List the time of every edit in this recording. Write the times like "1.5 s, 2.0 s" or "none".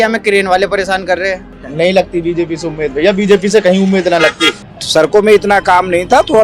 1.6 s, 4.5 s